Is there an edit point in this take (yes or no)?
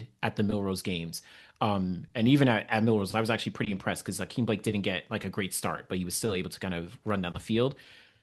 no